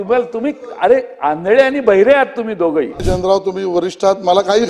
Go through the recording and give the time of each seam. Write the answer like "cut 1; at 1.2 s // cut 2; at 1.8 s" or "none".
cut 1; at 3.0 s